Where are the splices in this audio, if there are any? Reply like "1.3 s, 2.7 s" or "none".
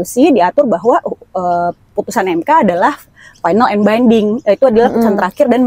none